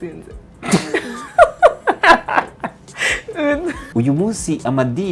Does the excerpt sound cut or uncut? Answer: cut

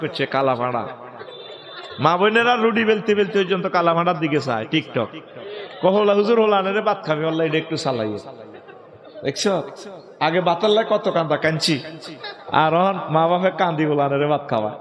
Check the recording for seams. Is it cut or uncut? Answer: uncut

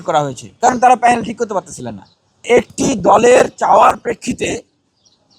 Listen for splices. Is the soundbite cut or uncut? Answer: cut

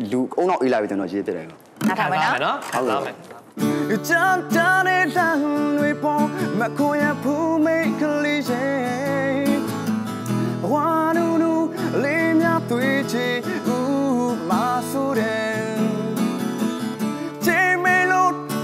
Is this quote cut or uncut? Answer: uncut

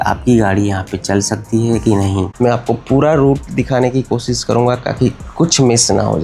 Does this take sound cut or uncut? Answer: cut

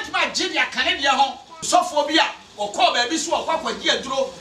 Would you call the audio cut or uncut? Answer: cut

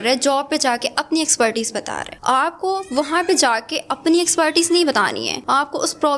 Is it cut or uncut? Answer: uncut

